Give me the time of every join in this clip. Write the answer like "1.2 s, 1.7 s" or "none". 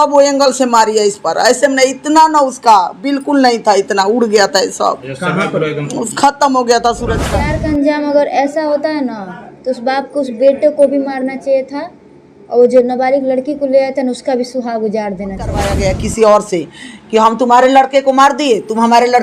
7.2 s, 15.7 s